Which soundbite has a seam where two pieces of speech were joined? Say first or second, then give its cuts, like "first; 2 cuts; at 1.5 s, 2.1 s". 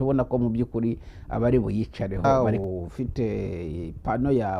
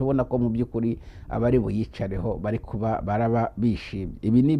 first; 1 cut; at 2.2 s